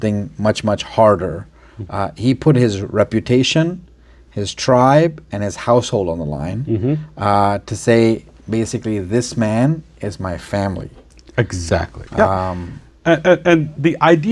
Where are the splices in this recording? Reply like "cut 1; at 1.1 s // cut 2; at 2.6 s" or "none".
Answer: none

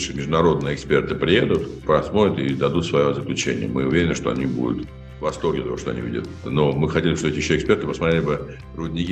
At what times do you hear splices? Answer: cut 1; at 1.8 s // cut 2; at 6.4 s

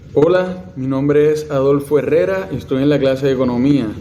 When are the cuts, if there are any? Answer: none

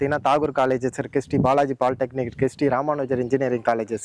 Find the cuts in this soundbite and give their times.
none

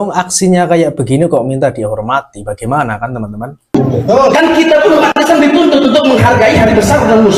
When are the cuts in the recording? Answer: none

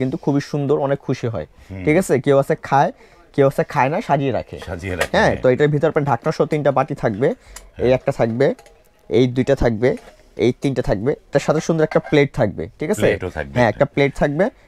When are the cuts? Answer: none

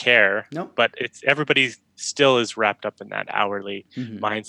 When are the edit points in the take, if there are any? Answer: none

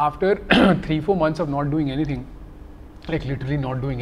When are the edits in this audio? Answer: none

